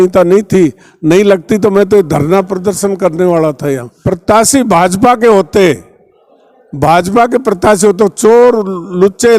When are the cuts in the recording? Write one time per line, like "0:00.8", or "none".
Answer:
0:03.9